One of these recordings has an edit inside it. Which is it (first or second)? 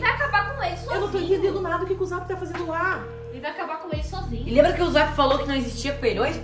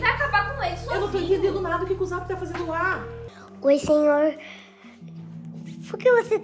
second